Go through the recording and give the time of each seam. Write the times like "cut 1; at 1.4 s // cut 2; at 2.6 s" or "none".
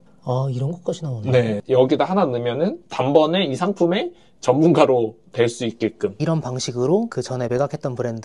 cut 1; at 1.6 s // cut 2; at 6.2 s